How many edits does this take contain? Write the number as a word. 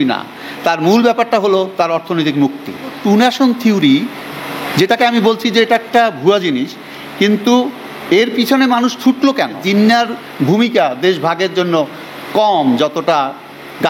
two